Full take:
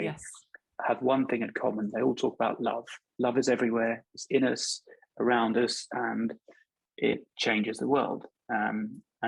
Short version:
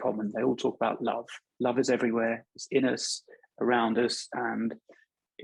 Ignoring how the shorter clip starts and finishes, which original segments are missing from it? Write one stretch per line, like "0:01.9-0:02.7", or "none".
none